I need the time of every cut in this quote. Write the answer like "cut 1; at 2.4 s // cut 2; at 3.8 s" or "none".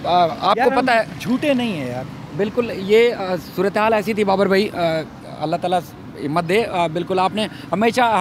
none

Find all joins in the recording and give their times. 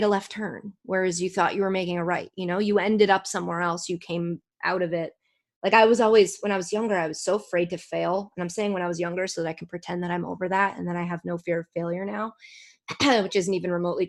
none

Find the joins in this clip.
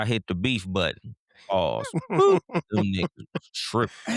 none

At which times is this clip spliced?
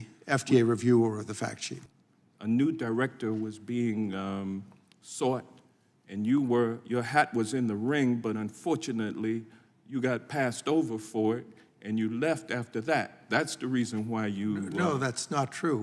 cut 1; at 1.7 s

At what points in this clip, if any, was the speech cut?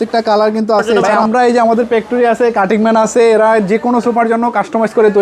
cut 1; at 1.1 s

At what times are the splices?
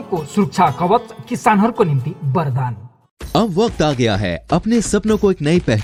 none

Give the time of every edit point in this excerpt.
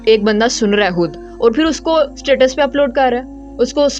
none

